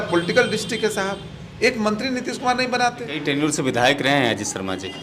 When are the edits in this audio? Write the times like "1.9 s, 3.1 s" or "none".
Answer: 3.1 s